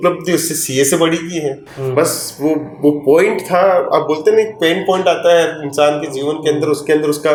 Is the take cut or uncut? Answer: uncut